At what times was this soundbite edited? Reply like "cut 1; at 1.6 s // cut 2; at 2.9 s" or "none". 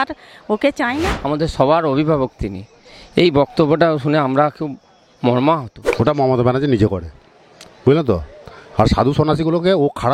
cut 1; at 1.1 s // cut 2; at 5.8 s